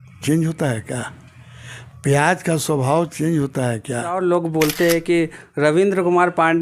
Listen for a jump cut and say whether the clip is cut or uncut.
cut